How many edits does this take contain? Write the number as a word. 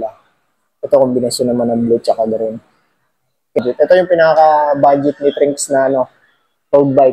one